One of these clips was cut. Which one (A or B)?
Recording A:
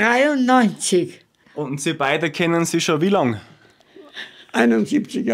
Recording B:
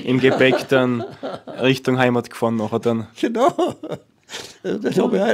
A